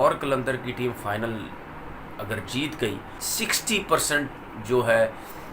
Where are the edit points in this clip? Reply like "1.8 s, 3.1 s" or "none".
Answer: 3.2 s